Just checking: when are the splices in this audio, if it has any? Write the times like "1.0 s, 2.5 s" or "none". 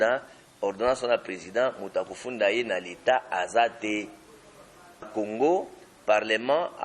5.1 s